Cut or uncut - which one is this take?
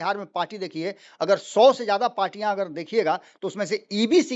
uncut